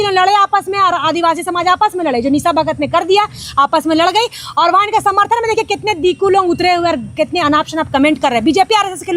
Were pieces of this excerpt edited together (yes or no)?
no